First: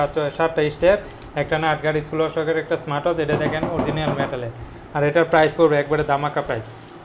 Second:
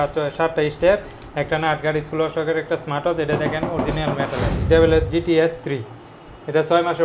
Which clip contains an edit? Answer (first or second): second